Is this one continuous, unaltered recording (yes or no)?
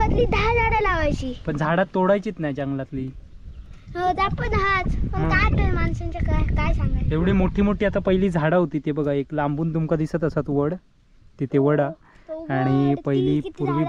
yes